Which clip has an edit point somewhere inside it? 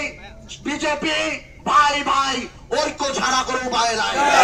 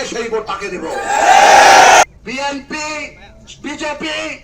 second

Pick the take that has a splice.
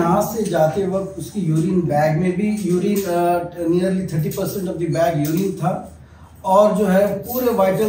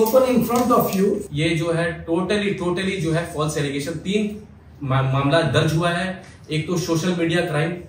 second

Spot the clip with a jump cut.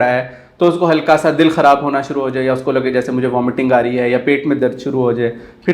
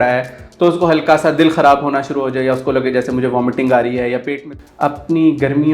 second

